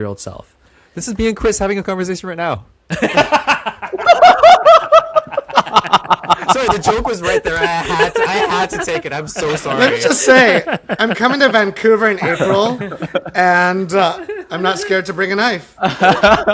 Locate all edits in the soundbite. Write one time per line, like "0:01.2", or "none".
none